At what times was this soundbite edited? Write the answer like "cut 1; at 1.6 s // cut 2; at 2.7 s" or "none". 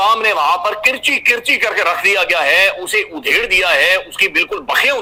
none

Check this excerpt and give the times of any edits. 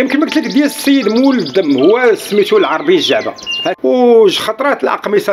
cut 1; at 3.6 s

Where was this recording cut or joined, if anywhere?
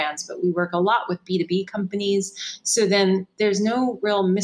none

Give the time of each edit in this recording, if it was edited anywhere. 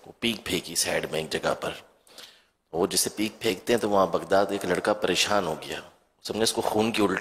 none

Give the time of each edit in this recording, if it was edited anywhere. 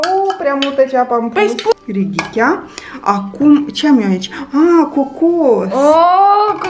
cut 1; at 1.7 s

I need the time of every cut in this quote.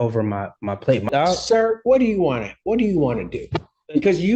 cut 1; at 1.1 s

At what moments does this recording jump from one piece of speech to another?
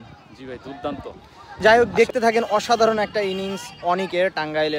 cut 1; at 1.6 s

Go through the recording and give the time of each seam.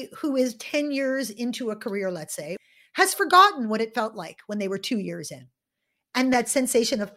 cut 1; at 2.6 s // cut 2; at 6.3 s

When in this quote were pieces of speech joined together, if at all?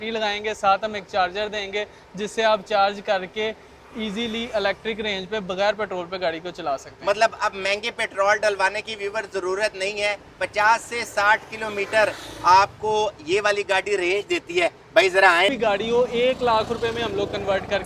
cut 1; at 15.5 s

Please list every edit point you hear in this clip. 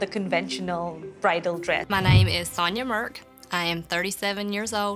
cut 1; at 1.8 s

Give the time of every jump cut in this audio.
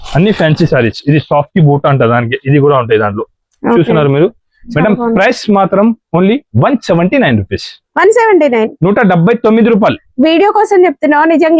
none

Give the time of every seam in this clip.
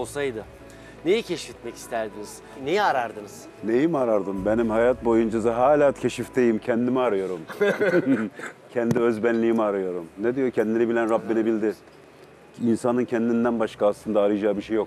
none

